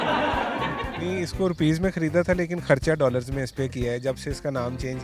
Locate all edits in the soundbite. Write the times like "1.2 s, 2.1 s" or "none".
1.0 s